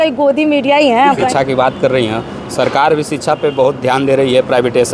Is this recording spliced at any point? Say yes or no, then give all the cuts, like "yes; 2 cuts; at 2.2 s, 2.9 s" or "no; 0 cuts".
yes; 1 cut; at 1.3 s